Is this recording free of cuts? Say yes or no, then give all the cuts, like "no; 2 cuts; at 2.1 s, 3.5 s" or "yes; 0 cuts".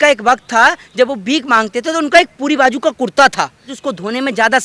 no; 1 cut; at 3.7 s